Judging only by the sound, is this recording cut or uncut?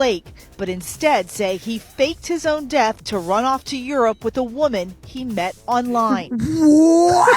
cut